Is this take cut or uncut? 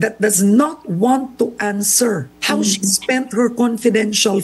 cut